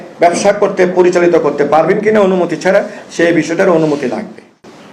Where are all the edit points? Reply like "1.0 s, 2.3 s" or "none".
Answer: 2.9 s